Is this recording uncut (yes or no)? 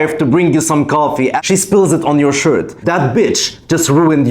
no